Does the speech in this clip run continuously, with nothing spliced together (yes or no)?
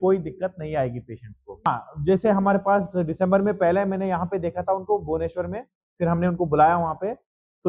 no